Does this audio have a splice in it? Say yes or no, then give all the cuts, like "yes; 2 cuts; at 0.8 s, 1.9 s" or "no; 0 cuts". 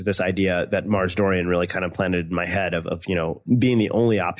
yes; 1 cut; at 3.4 s